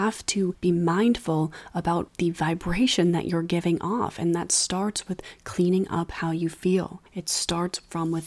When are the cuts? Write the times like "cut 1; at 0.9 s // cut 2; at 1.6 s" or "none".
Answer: cut 1; at 2.1 s